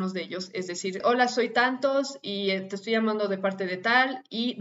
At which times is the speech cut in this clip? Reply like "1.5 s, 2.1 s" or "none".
1.0 s